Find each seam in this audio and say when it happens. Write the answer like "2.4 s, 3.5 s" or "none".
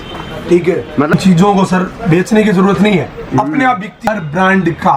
1.1 s, 4.1 s